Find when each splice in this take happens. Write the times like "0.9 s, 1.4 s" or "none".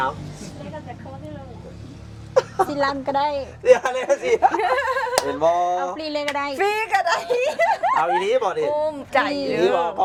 none